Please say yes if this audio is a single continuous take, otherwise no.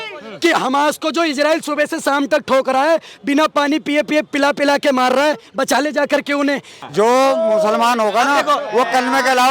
no